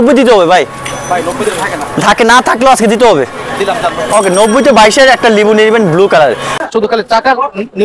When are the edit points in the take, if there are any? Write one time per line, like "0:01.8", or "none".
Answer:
0:06.5